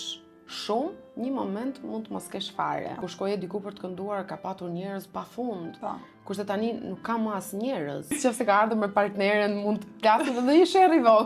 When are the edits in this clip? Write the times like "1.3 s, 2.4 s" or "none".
3.1 s, 8.2 s

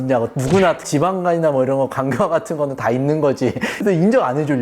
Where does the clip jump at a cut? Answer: 3.7 s

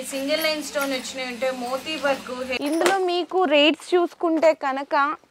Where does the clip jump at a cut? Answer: 2.6 s

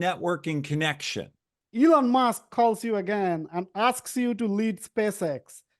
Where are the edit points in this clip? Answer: 1.4 s

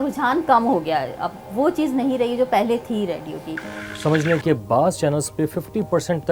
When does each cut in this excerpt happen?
3.7 s

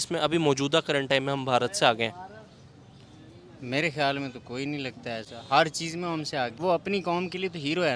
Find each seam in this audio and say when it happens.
6.6 s

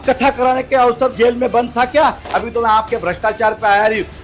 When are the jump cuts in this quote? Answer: 1.1 s, 2.2 s

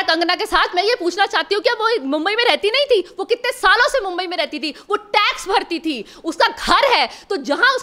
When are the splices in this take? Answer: none

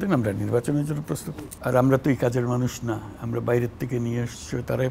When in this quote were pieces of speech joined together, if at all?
1.1 s

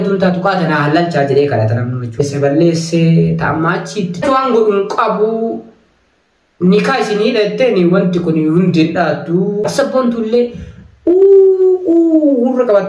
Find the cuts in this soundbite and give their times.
2.2 s, 4.2 s, 9.5 s

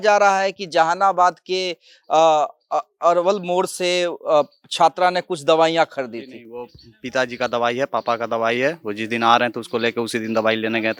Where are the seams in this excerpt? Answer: none

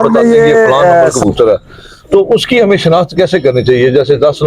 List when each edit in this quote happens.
1.2 s

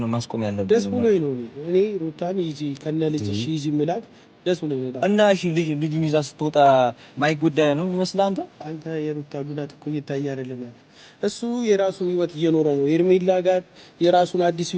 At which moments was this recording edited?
4.9 s

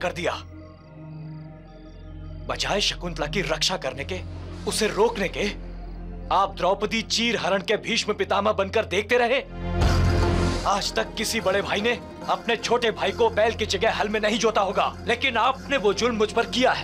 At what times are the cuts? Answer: 10.6 s

